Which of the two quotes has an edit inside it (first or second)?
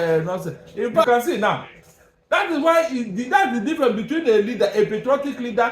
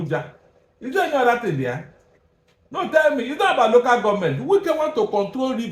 first